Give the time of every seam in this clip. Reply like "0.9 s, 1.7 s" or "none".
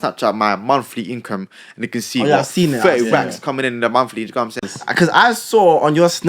4.7 s